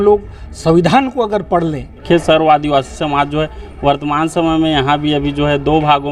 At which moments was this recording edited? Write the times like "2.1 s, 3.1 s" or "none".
2.0 s